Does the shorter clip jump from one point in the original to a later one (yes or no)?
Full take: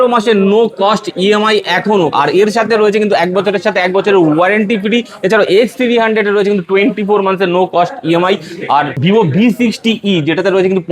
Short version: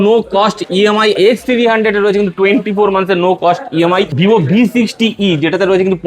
yes